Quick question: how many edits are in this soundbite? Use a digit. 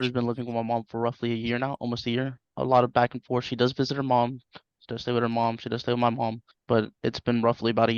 2